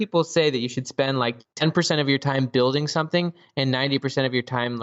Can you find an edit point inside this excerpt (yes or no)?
no